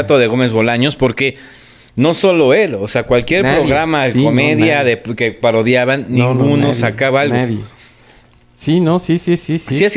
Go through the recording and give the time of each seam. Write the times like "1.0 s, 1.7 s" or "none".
none